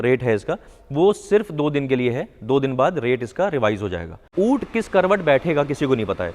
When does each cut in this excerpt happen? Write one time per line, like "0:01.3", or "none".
0:04.3